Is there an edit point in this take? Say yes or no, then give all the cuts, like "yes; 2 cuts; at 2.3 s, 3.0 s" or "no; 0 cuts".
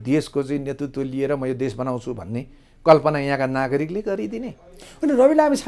no; 0 cuts